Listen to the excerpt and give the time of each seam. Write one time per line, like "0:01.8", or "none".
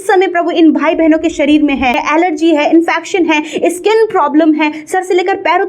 0:02.0